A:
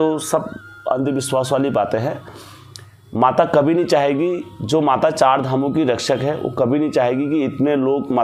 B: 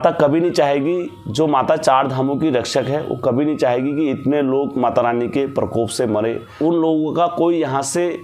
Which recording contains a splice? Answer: B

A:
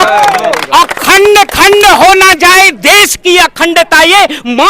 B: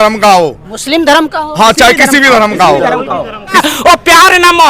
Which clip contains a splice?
B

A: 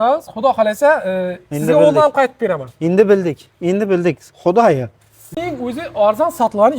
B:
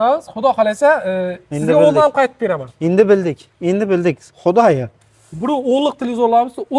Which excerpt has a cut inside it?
A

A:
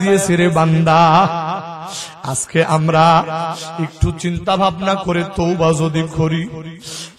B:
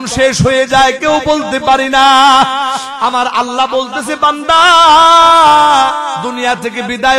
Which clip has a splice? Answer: B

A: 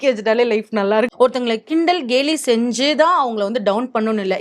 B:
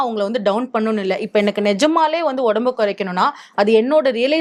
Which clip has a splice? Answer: A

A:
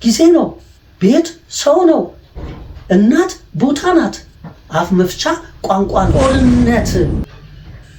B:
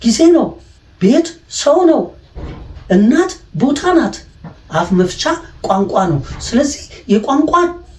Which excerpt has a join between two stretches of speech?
A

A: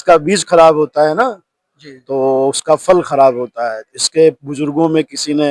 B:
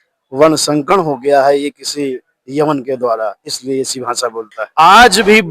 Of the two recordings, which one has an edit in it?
B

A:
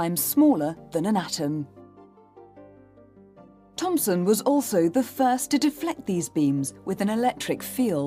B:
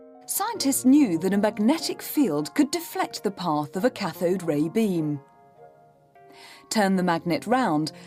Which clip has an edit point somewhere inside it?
A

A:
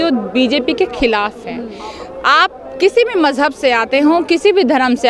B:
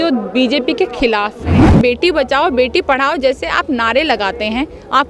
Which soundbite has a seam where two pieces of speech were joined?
B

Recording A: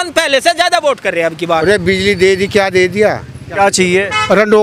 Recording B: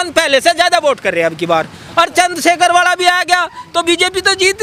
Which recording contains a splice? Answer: A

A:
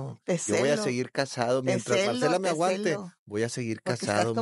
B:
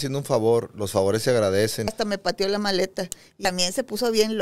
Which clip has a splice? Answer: B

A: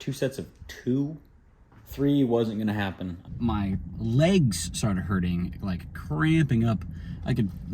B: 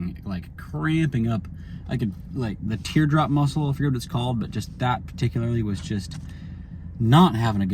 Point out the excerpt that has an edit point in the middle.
A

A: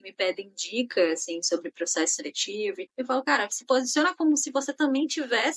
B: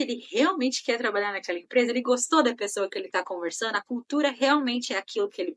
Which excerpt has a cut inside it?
A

